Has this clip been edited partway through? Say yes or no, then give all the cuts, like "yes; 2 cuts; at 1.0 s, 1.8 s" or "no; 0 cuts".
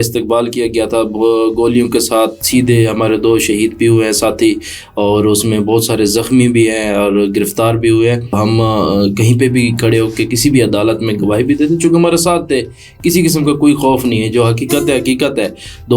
yes; 1 cut; at 8.3 s